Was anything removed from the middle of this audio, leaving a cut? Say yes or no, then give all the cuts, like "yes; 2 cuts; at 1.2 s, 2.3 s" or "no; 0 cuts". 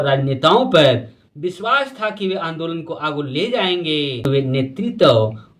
yes; 1 cut; at 4.6 s